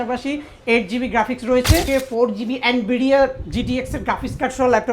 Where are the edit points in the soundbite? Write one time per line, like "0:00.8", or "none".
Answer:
0:01.9